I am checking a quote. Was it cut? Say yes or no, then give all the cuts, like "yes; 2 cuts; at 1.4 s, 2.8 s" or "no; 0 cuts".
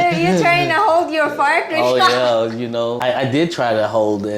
yes; 1 cut; at 3.0 s